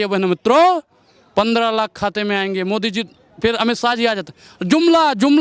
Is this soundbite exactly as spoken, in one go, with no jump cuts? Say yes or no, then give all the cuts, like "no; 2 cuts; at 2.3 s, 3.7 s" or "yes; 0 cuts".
yes; 0 cuts